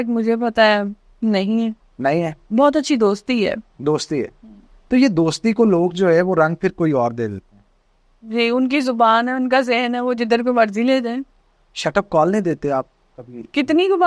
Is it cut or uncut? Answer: uncut